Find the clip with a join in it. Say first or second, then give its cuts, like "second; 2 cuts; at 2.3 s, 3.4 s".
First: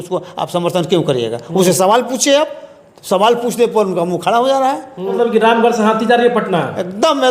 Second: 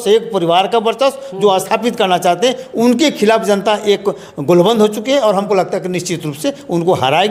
first; 1 cut; at 5.1 s